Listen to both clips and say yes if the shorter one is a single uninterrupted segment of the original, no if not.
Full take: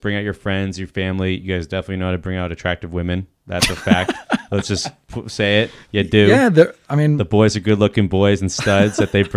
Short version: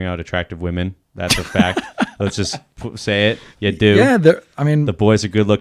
yes